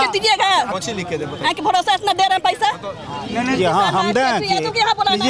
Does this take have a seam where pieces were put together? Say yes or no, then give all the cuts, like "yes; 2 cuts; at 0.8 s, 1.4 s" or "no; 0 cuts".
no; 0 cuts